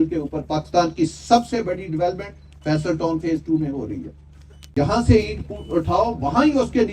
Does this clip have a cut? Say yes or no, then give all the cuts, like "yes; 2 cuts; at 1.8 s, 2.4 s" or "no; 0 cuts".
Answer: yes; 1 cut; at 4.7 s